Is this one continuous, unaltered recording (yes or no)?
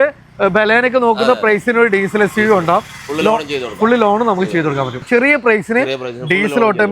no